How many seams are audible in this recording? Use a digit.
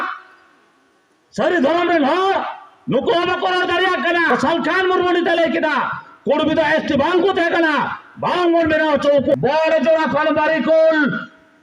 2